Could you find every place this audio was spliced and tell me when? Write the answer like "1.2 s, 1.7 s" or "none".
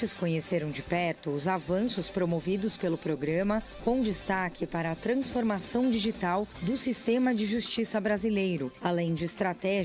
8.8 s